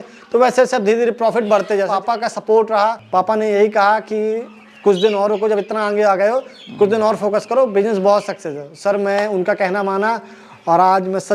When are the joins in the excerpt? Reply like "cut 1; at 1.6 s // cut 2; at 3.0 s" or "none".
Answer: cut 1; at 1.9 s // cut 2; at 3.0 s

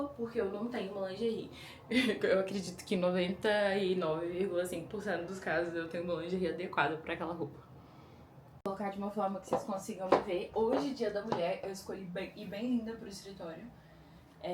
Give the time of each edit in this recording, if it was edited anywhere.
cut 1; at 8.7 s

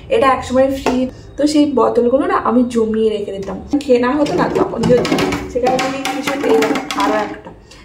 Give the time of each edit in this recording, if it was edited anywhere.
cut 1; at 1.1 s // cut 2; at 3.7 s

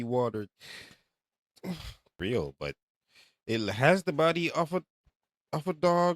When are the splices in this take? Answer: cut 1; at 2.1 s

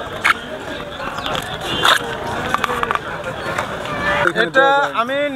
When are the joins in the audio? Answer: cut 1; at 1.4 s // cut 2; at 4.2 s

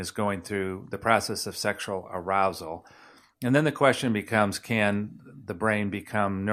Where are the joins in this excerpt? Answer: none

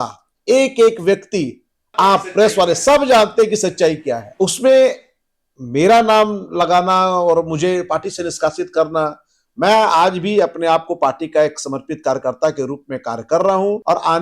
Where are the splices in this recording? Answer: none

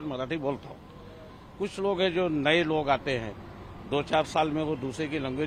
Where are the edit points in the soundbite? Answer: none

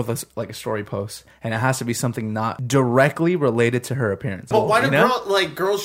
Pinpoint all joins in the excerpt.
cut 1; at 2.6 s // cut 2; at 4.5 s

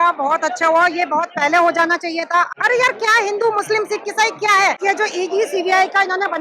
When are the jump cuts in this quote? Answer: cut 1; at 2.5 s // cut 2; at 4.8 s

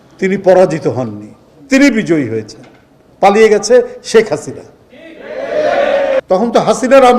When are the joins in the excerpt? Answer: cut 1; at 6.2 s

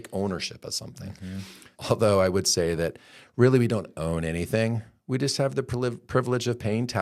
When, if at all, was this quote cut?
cut 1; at 1.7 s

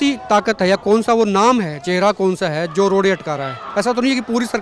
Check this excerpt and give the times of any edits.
none

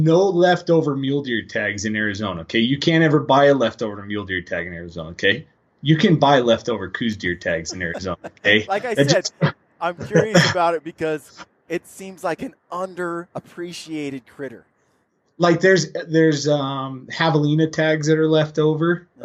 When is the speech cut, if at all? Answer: none

